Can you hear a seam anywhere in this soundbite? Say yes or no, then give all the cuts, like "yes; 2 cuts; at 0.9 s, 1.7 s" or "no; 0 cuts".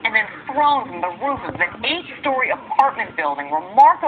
no; 0 cuts